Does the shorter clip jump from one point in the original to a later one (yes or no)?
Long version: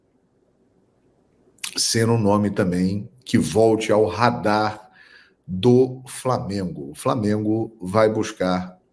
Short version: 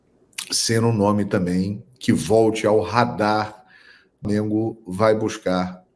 yes